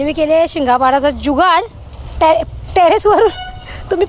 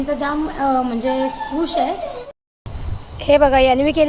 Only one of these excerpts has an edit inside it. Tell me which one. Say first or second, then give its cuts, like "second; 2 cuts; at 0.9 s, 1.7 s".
second; 1 cut; at 2.2 s